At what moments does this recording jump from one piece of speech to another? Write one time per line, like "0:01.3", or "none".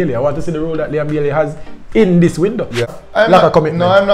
0:02.9